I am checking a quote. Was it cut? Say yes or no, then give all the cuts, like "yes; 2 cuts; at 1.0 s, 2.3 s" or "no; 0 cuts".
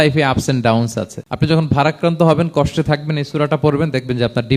yes; 1 cut; at 1.2 s